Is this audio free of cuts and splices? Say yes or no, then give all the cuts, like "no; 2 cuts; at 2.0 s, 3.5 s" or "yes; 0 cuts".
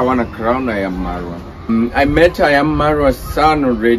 no; 1 cut; at 1.7 s